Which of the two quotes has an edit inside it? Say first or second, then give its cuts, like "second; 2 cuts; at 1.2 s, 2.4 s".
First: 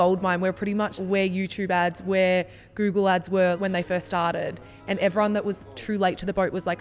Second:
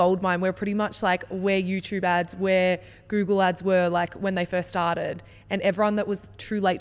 first; 2 cuts; at 0.9 s, 3.6 s